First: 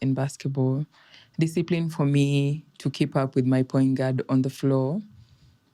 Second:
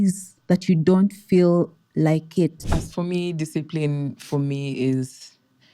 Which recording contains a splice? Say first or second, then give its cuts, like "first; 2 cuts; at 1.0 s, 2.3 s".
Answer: second; 1 cut; at 2.6 s